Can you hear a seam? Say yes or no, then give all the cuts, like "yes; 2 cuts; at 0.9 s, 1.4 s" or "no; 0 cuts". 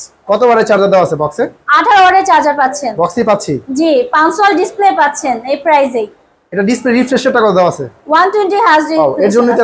no; 0 cuts